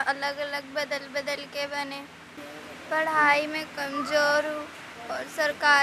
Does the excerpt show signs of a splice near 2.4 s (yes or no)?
yes